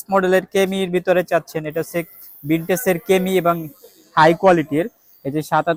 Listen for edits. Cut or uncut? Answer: uncut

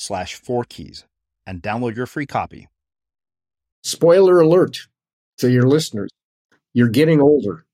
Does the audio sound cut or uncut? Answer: cut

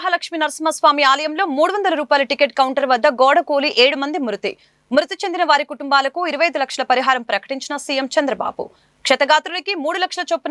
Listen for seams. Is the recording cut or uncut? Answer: uncut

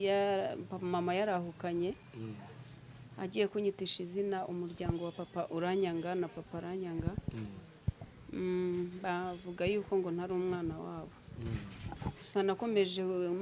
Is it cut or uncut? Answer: cut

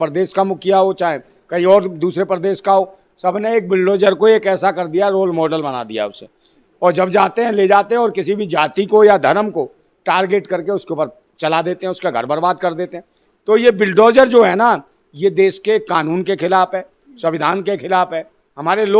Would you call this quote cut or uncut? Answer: uncut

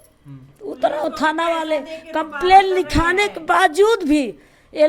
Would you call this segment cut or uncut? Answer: uncut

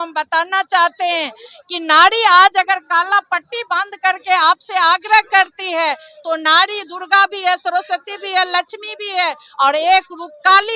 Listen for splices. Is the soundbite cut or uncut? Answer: uncut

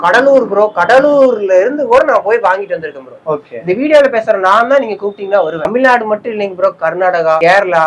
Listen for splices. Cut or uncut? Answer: cut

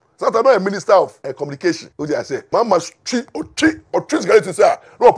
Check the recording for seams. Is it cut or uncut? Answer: cut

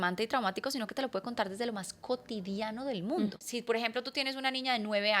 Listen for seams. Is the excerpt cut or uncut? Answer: cut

